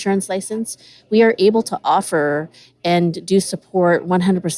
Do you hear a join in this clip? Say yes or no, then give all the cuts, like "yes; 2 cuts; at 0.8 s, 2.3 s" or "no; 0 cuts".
no; 0 cuts